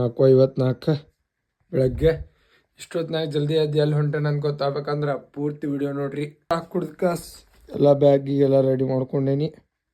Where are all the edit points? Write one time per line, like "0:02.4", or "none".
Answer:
0:06.5